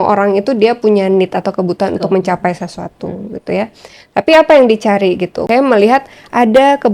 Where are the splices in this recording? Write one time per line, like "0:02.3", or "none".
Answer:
0:05.4